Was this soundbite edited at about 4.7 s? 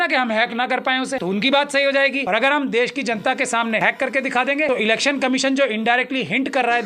yes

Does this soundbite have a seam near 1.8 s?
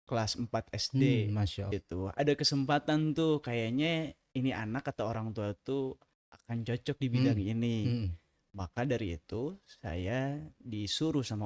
yes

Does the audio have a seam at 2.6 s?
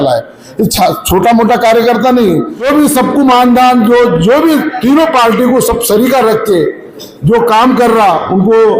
yes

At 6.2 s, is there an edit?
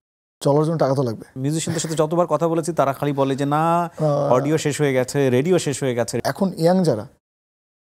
yes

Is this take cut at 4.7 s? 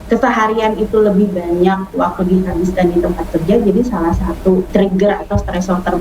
yes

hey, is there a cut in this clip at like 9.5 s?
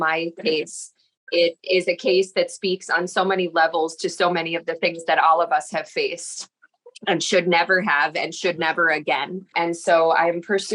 yes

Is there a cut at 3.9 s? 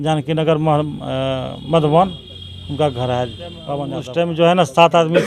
yes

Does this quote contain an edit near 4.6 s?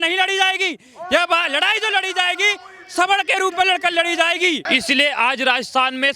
yes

